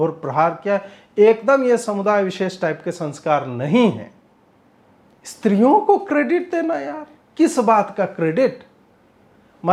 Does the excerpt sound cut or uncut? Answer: uncut